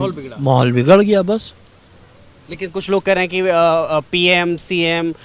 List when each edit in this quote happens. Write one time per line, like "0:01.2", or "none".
none